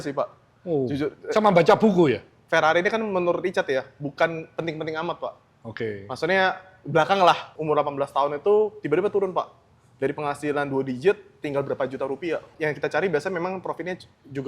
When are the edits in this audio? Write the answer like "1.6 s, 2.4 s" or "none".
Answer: 2.3 s, 7.5 s, 12.5 s